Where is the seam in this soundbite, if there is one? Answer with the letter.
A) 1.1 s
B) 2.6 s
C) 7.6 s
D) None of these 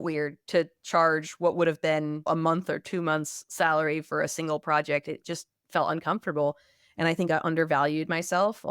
D